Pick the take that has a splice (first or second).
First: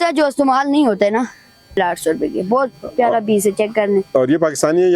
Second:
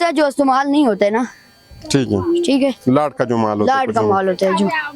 first